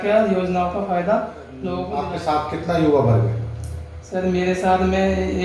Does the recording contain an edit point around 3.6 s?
no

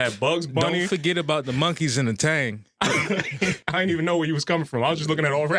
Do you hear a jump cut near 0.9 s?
no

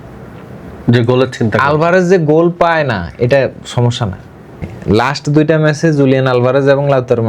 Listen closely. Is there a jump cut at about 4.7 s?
yes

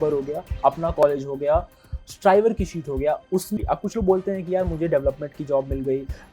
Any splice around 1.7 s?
no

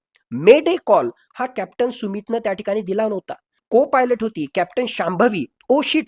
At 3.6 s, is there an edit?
yes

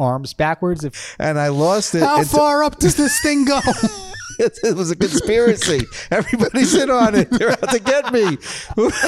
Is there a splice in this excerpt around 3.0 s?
no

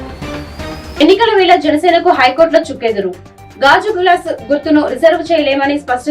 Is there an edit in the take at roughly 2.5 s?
no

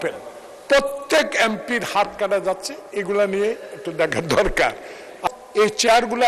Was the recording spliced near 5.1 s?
yes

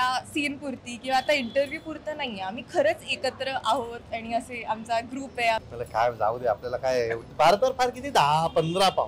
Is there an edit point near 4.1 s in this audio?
no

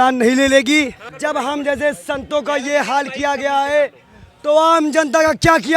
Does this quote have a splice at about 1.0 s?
yes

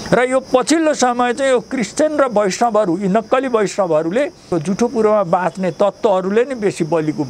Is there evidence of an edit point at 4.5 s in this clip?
yes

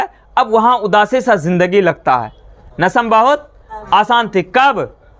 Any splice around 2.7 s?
yes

